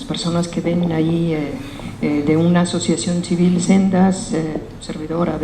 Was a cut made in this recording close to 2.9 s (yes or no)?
yes